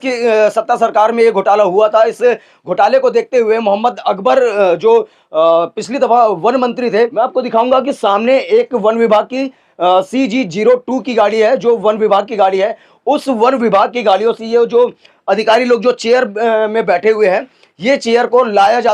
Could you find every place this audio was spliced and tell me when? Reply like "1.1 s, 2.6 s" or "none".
7.1 s